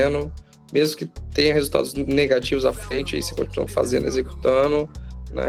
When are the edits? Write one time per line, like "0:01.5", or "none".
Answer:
none